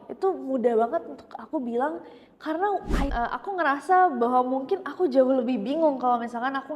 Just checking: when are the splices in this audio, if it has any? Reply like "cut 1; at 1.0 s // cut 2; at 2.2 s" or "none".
cut 1; at 3.0 s